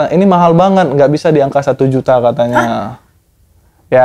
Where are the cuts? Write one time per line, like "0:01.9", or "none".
none